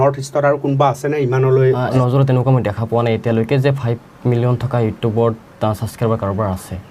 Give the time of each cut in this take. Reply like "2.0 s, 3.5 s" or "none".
1.9 s